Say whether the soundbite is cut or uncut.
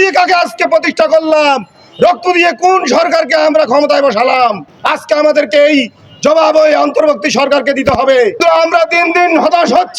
cut